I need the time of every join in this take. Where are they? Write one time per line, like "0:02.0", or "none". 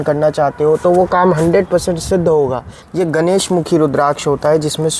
0:02.8